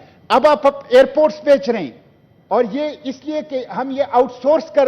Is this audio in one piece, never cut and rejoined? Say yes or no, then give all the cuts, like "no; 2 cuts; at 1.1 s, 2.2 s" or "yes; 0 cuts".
yes; 0 cuts